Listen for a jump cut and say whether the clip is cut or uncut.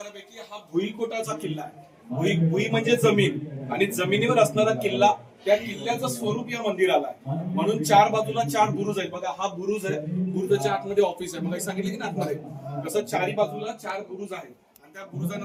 uncut